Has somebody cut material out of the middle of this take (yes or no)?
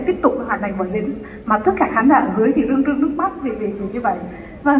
no